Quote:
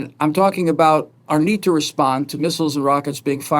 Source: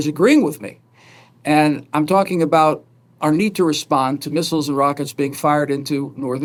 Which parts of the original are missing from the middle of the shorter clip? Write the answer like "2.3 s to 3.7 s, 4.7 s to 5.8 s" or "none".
2.9 s to 3.1 s